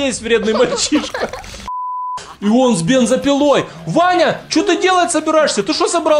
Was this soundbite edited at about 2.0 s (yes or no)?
yes